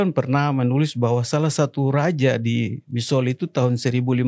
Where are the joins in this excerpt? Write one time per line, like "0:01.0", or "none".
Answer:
none